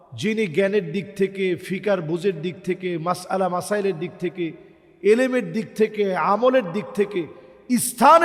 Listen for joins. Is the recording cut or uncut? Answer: uncut